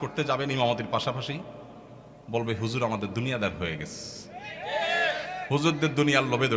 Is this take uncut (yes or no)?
yes